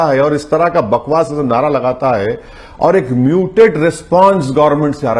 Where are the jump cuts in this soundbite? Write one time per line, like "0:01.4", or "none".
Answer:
none